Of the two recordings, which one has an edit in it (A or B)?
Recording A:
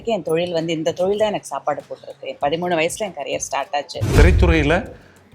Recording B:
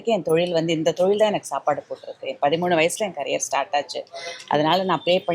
A